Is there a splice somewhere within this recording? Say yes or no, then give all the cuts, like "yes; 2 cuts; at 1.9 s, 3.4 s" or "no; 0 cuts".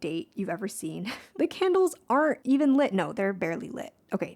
yes; 2 cuts; at 1.2 s, 2.4 s